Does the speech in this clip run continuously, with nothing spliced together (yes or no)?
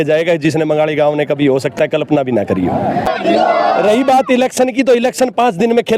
no